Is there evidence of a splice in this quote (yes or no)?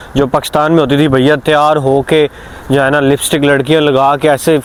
no